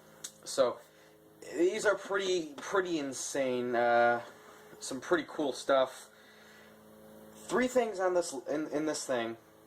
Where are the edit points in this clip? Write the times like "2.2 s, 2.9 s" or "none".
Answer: 7.7 s